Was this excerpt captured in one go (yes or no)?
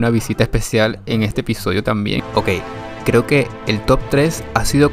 no